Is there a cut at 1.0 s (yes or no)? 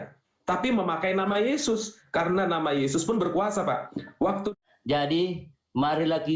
no